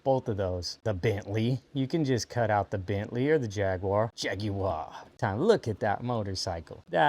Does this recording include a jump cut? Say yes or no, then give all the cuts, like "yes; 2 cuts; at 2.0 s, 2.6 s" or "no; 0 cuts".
yes; 1 cut; at 5.2 s